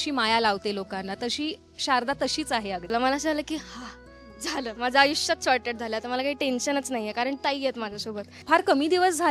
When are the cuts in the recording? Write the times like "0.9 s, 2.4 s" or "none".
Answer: 2.9 s, 8.3 s